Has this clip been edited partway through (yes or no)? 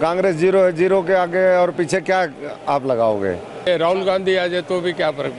yes